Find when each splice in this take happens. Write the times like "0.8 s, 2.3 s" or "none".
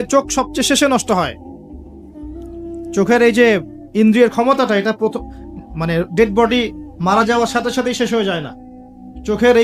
1.4 s, 2.9 s